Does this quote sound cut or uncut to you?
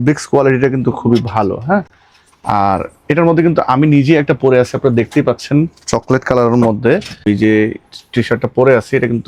uncut